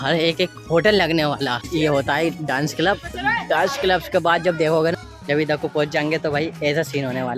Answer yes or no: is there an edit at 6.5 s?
no